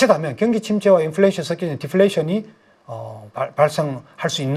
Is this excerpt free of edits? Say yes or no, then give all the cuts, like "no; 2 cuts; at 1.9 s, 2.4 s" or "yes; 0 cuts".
yes; 0 cuts